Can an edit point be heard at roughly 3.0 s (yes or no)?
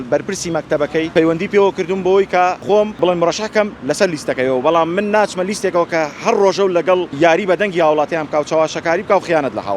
yes